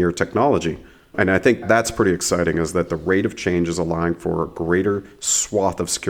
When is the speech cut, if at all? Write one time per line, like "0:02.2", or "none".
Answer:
0:01.1